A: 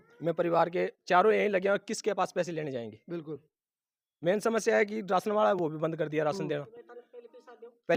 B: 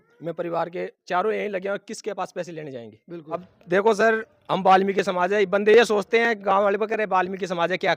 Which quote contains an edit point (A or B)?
B